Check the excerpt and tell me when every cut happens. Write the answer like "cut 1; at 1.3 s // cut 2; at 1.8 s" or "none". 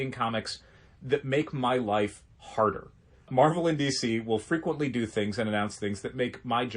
cut 1; at 3.3 s

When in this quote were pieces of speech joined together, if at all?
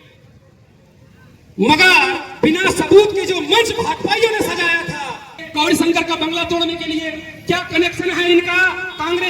cut 1; at 5.4 s

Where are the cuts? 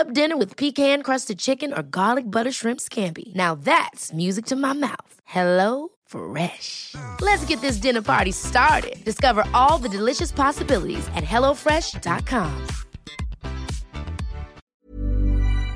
cut 1; at 14.6 s

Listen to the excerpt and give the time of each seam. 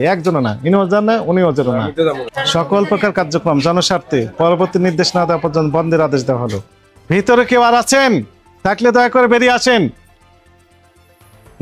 cut 1; at 2.3 s // cut 2; at 6.7 s

